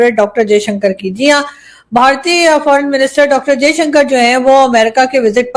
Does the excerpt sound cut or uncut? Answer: uncut